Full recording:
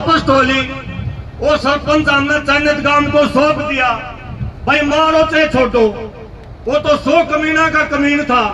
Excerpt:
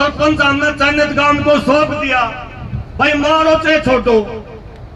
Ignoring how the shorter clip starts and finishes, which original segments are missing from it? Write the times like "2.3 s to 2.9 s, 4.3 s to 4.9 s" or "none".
none